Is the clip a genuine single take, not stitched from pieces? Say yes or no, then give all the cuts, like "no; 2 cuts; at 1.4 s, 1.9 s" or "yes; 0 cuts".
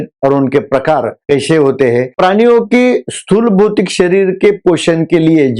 no; 1 cut; at 2.1 s